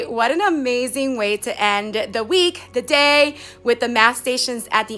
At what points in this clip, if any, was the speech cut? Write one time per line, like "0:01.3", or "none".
none